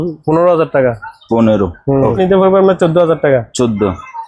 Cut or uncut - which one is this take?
cut